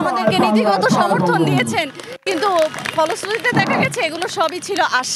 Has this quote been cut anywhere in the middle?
no; 0 cuts

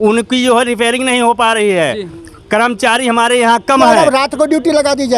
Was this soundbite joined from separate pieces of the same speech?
yes; 1 cut; at 3.9 s

